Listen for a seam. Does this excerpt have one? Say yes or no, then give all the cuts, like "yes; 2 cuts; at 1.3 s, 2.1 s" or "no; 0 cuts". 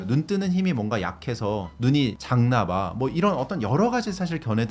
yes; 1 cut; at 2.2 s